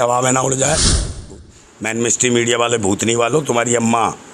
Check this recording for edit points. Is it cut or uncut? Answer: cut